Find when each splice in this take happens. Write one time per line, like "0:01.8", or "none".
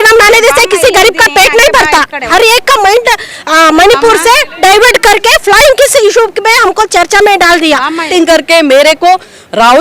0:02.3
0:08.1